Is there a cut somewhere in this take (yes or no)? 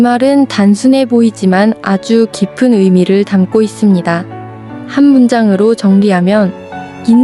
no